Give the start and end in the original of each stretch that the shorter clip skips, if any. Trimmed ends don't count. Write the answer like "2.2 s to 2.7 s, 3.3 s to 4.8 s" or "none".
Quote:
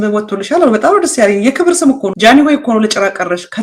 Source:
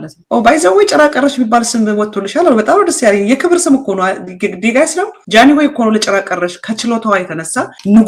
3.9 s to 5.2 s